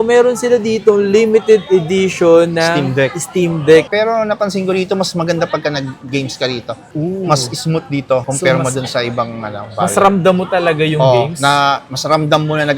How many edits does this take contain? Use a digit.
1